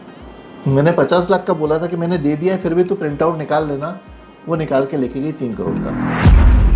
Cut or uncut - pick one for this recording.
cut